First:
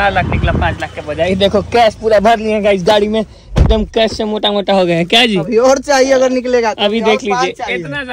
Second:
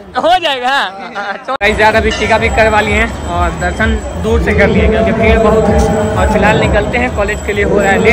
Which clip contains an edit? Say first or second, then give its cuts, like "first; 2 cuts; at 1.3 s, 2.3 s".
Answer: second; 1 cut; at 1.6 s